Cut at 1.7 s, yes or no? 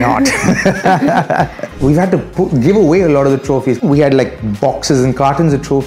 yes